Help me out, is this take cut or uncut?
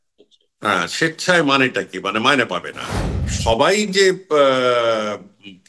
cut